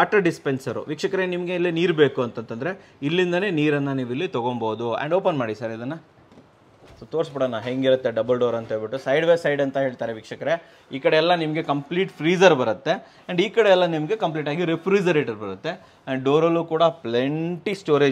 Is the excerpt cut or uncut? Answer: uncut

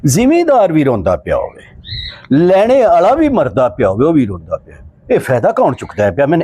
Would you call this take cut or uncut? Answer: uncut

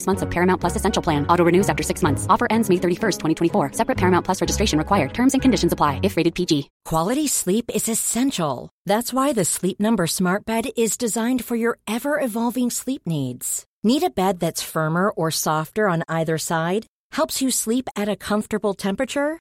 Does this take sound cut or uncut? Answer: cut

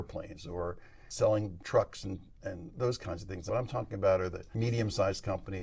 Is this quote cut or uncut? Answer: cut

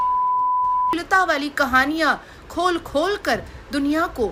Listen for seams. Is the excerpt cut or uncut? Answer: uncut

